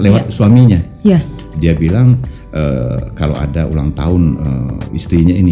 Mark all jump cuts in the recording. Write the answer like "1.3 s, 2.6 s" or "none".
none